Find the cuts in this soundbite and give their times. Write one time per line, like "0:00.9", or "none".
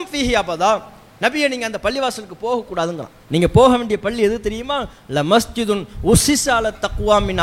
0:03.1